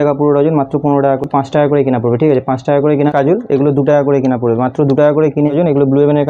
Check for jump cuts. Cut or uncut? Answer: cut